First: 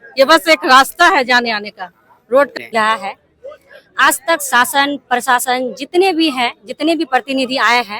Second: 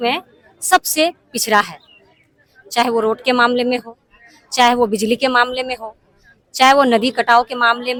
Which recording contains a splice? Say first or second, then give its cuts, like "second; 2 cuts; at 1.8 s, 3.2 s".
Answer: first; 1 cut; at 2.6 s